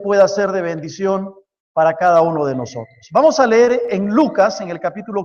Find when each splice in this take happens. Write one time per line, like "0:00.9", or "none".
none